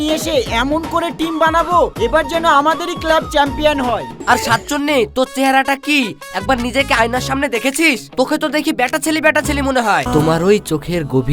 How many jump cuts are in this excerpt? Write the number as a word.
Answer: two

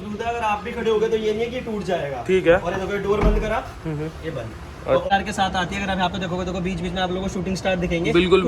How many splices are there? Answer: one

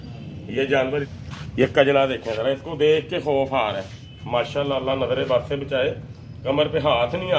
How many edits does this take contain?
one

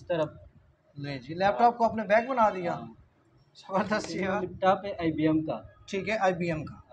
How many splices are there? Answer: one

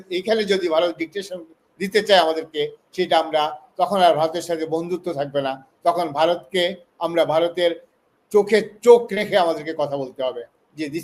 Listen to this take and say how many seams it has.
zero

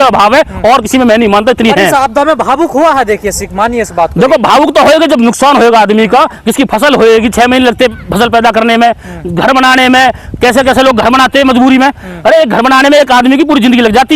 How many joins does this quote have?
zero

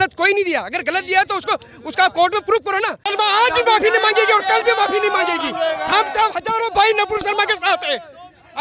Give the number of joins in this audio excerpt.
one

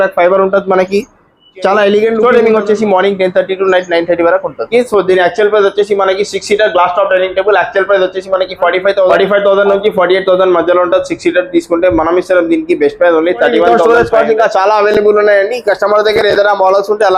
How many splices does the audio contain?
four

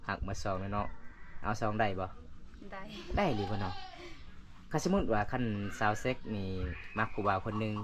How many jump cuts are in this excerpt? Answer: zero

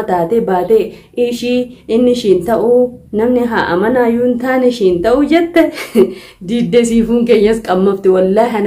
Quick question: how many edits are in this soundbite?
zero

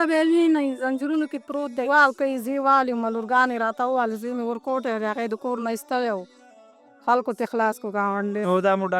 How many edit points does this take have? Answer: one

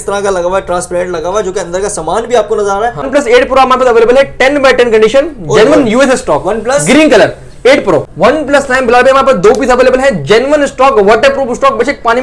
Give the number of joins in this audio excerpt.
two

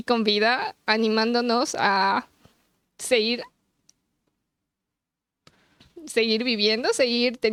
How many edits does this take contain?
zero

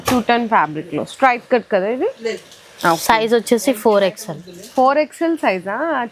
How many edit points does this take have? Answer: zero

